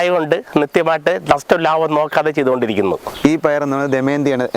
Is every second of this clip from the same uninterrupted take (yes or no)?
no